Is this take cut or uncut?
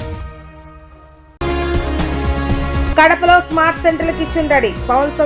cut